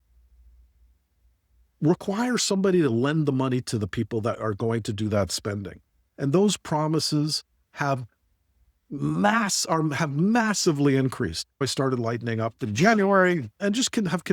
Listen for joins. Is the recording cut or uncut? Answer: cut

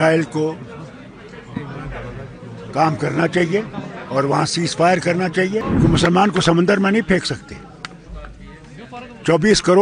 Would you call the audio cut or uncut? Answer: cut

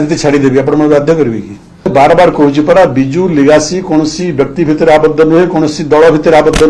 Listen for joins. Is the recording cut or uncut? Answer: cut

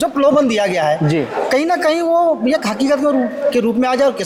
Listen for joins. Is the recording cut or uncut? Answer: uncut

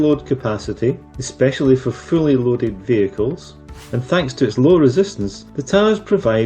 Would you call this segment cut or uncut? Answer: cut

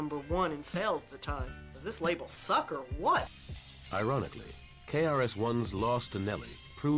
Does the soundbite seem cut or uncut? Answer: cut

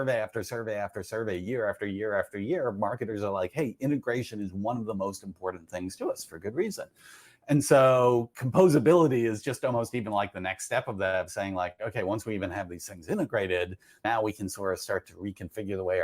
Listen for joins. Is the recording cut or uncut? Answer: cut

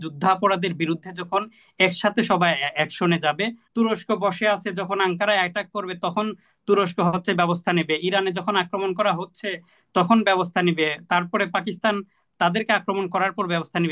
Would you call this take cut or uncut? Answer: cut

